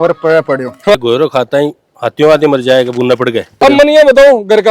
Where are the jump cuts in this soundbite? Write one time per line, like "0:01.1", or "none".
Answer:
0:00.9
0:03.6